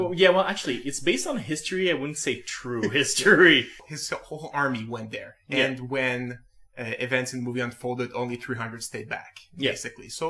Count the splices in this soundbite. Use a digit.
0